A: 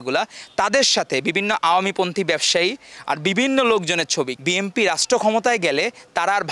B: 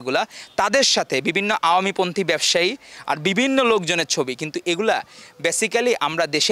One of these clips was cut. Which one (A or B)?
A